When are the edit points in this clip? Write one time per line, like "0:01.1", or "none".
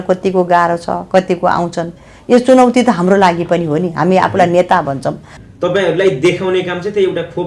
0:05.3

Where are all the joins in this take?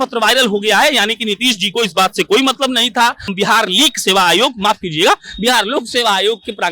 0:03.3

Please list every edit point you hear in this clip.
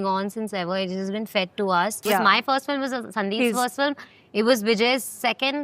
0:02.1

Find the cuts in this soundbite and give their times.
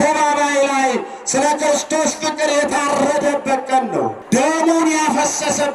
0:04.2

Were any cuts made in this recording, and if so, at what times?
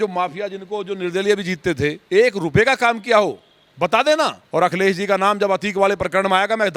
0:02.0
0:04.4

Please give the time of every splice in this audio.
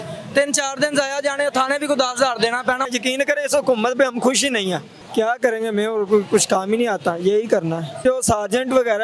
0:02.8
0:04.9
0:08.0

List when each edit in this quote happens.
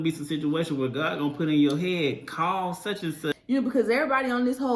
0:03.3

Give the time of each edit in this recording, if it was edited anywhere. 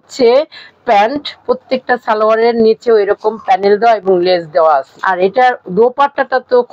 0:01.4
0:05.0

